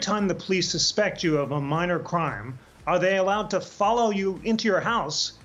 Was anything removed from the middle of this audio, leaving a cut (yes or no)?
no